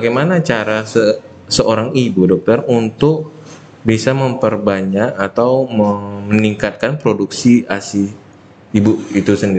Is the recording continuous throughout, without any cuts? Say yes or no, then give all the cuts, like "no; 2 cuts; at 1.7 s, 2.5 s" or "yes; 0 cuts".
yes; 0 cuts